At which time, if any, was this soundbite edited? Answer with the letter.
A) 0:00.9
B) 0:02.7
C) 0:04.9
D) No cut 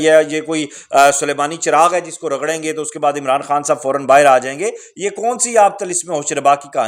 D